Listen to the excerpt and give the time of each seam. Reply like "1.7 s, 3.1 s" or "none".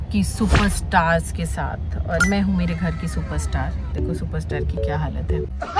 none